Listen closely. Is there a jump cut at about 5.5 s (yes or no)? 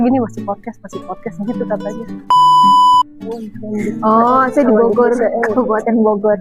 no